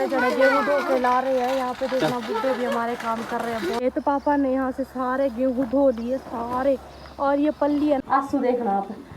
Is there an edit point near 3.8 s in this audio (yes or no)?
yes